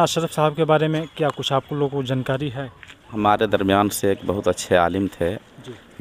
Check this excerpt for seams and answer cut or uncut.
cut